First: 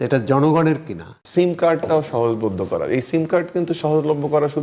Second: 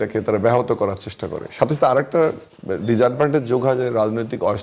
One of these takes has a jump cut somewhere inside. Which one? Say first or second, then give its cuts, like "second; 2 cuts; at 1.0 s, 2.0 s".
first; 1 cut; at 1.1 s